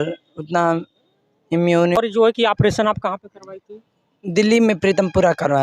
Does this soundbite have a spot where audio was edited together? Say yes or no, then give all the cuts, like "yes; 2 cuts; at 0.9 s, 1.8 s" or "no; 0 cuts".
yes; 1 cut; at 2.0 s